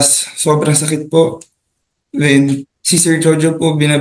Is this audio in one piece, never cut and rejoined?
no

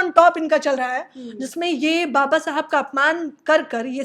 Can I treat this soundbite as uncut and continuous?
yes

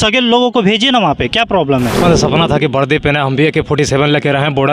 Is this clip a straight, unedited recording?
no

